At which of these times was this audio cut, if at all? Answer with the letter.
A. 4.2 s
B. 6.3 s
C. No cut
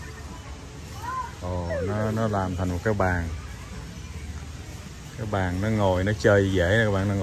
C